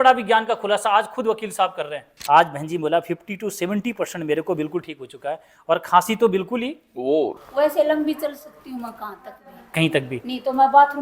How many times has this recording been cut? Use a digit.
2